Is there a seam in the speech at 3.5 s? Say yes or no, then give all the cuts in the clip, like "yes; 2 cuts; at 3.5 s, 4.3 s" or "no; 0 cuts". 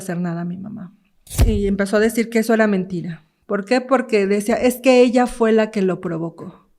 no; 1 cut; at 1.3 s